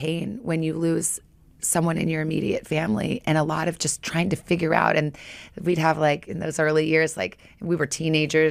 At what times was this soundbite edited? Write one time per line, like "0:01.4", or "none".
none